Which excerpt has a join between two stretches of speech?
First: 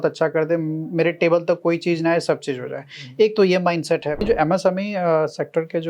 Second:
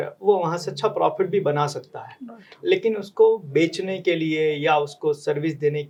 first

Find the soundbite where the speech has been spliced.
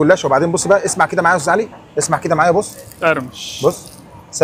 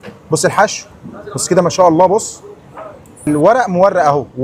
second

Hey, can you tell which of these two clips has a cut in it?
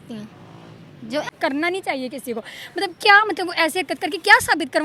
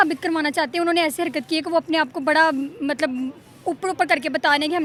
first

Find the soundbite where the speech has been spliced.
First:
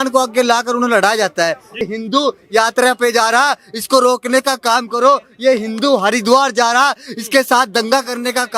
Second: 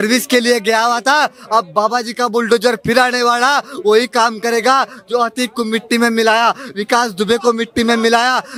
first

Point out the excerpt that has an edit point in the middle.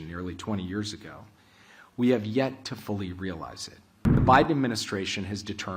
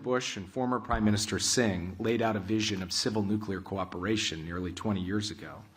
first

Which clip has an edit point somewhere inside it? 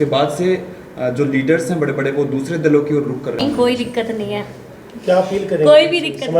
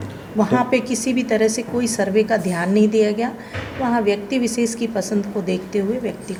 first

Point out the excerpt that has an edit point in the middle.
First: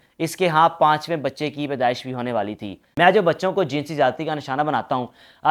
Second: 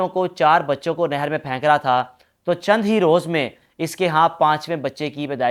first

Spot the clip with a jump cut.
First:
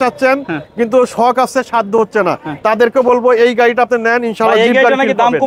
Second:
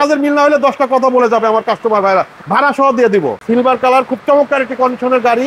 second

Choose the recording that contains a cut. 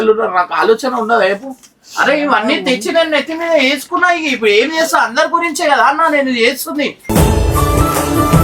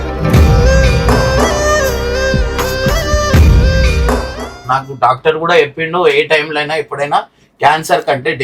second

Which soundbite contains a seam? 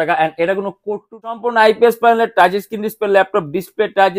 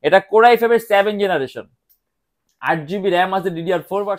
first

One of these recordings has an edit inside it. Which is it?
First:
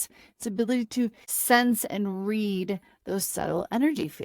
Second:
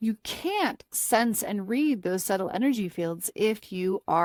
first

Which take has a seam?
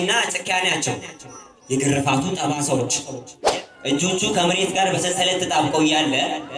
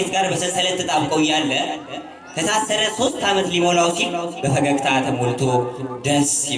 first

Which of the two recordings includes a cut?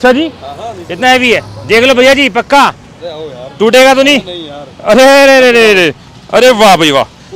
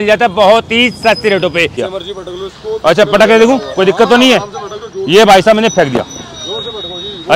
second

